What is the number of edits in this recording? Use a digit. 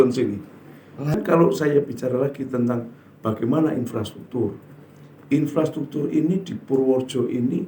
1